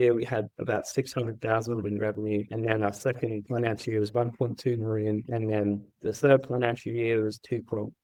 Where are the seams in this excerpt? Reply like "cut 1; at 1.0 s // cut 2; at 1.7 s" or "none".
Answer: none